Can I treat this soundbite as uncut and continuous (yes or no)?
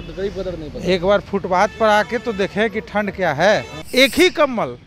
no